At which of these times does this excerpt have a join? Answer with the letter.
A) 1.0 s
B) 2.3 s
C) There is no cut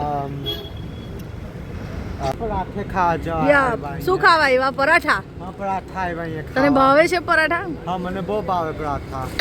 B